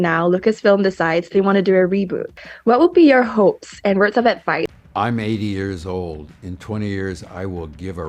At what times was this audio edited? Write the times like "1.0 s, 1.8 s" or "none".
2.3 s, 4.7 s